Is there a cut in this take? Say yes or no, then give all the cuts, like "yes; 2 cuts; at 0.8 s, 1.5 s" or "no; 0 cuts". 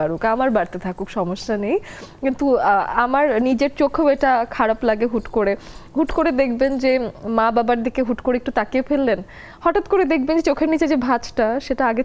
no; 0 cuts